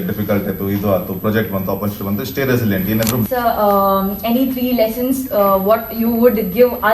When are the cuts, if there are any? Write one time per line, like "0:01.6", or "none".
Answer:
0:03.3